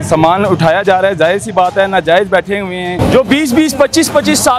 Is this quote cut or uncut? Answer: cut